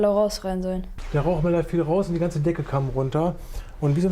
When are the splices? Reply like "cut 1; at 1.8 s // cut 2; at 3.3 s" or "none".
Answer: cut 1; at 0.9 s